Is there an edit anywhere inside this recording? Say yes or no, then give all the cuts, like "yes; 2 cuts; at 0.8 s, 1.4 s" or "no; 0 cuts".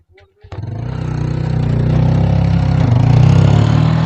no; 0 cuts